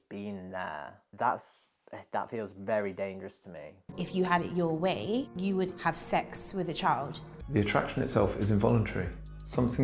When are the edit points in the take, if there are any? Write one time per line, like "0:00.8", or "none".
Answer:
0:01.0
0:04.0
0:07.2